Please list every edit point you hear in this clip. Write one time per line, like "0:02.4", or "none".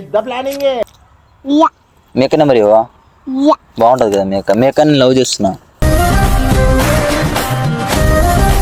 none